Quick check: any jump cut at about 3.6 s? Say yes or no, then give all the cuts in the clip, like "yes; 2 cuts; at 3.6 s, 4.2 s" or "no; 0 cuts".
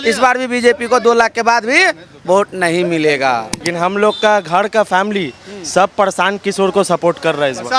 yes; 1 cut; at 3.6 s